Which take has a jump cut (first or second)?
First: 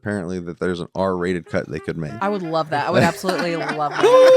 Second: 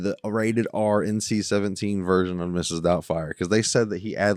first